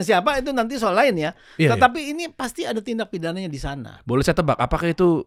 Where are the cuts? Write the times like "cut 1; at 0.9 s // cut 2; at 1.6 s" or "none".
none